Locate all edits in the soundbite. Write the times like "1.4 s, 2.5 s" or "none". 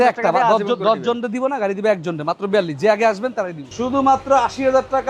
3.6 s

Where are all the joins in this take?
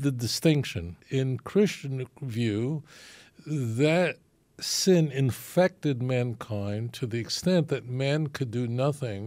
1.0 s

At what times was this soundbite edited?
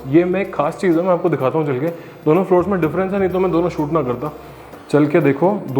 none

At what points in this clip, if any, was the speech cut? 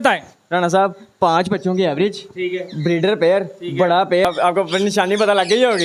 4.2 s

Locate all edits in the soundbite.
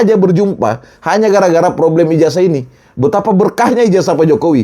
none

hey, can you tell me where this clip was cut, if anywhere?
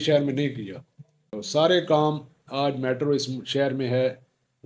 1.3 s

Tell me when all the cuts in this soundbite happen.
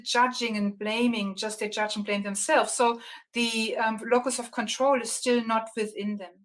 none

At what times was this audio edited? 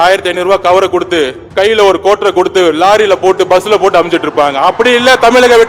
1.4 s

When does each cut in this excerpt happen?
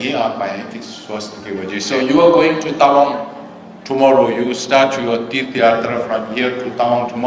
1.9 s

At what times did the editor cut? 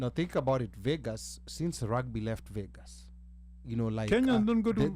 none

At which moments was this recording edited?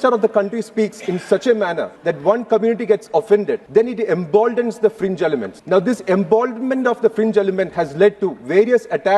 1.9 s, 3.6 s, 5.5 s

